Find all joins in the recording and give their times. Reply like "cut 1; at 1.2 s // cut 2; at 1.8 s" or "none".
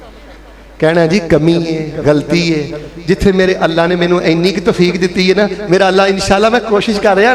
none